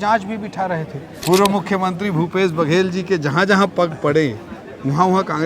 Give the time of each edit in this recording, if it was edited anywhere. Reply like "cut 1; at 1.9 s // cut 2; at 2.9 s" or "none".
cut 1; at 1.1 s